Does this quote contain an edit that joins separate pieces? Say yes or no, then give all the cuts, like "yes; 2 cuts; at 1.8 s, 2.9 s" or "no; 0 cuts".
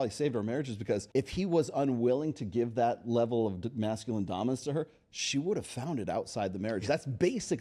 no; 0 cuts